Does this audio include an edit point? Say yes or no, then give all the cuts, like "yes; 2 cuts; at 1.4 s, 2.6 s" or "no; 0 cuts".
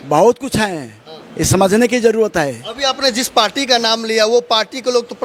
no; 0 cuts